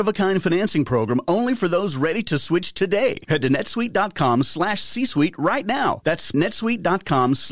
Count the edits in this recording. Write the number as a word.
one